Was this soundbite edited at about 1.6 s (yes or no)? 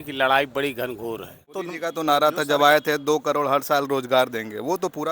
yes